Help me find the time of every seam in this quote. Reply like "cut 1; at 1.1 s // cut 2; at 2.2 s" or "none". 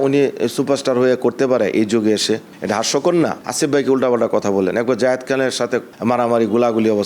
cut 1; at 3.4 s